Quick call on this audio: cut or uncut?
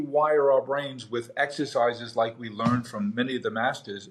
uncut